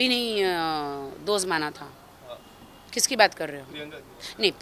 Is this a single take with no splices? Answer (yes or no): yes